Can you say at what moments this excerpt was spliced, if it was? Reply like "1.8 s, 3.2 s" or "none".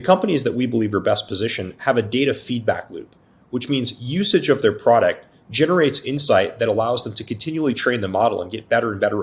none